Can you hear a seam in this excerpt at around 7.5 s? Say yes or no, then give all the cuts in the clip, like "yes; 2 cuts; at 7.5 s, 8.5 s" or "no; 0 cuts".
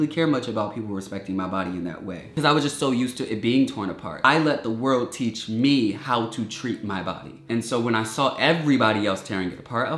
yes; 3 cuts; at 2.3 s, 4.2 s, 7.5 s